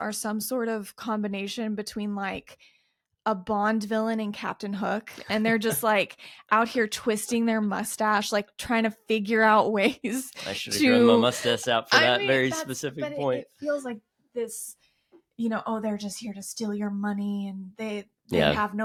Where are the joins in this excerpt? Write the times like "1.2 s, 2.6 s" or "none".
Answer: none